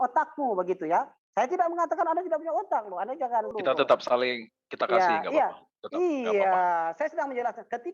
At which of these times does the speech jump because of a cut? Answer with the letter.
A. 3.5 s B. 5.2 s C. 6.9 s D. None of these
A